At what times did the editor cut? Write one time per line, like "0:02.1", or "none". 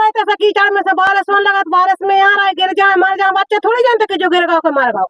none